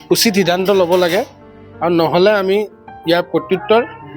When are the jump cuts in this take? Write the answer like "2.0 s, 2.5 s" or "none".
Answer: none